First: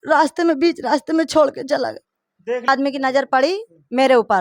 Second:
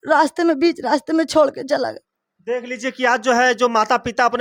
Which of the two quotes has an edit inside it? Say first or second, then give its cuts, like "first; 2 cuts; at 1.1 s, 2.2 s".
first; 1 cut; at 2.7 s